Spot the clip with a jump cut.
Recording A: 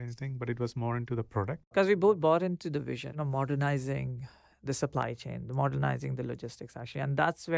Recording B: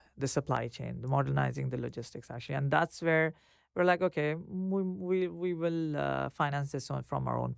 A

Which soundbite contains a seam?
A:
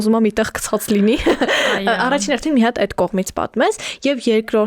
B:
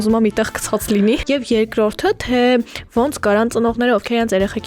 B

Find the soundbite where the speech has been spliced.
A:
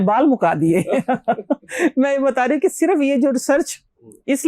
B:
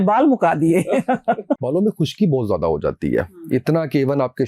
B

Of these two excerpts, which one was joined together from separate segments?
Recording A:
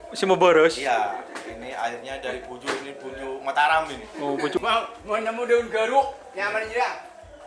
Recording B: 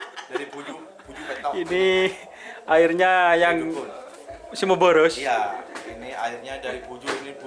A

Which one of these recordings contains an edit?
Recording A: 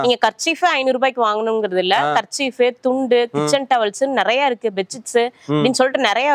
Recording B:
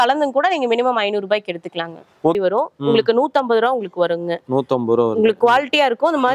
B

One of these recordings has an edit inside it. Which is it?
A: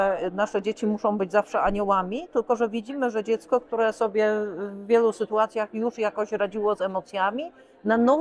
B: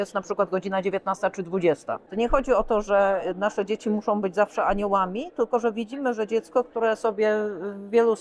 B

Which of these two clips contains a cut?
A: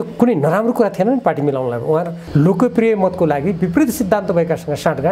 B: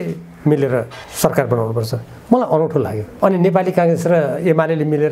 A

